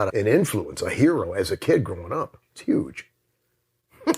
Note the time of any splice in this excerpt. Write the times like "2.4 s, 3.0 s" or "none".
1.3 s, 2.5 s